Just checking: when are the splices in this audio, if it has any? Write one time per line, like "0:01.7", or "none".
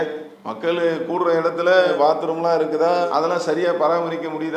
none